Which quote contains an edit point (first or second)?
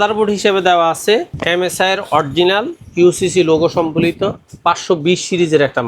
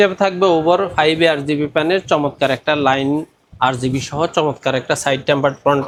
first